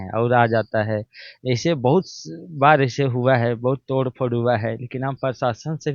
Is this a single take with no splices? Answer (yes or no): yes